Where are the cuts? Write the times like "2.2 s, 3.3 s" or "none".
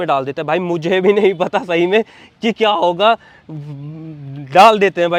none